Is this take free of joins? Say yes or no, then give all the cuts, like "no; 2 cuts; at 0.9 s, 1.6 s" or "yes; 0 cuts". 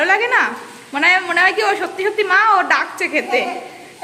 yes; 0 cuts